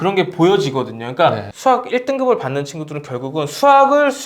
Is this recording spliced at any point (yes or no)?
no